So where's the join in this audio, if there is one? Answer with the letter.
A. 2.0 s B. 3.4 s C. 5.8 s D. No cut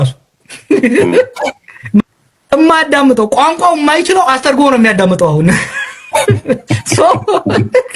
A